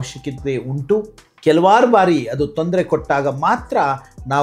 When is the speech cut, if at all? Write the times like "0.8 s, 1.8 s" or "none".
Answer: 1.2 s